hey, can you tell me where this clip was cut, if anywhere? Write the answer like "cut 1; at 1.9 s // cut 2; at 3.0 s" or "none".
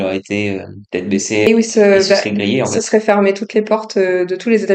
cut 1; at 1.5 s